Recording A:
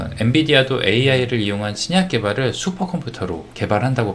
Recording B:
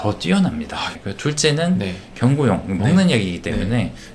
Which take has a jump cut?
B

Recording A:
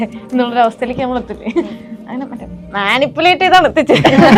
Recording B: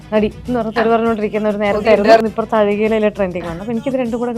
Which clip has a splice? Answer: B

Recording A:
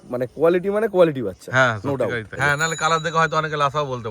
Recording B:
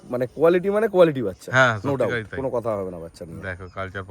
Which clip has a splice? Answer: A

